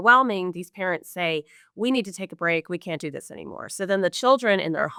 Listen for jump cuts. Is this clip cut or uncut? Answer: uncut